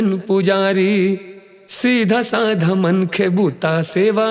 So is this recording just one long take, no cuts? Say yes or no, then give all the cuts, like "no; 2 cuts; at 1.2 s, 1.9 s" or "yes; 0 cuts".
yes; 0 cuts